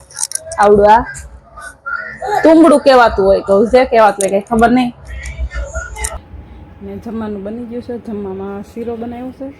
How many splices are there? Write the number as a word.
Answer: one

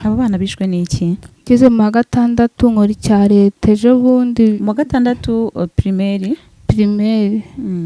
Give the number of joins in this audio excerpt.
one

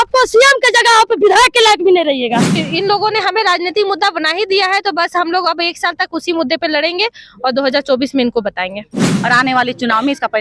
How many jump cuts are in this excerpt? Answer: two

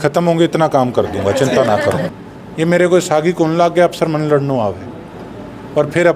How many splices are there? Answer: one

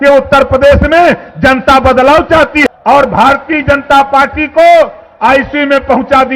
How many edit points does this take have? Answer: one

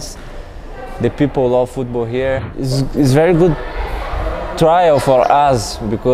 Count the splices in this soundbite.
one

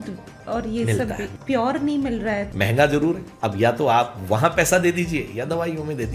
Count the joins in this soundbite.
three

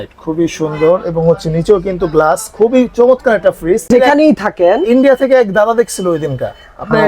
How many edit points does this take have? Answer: one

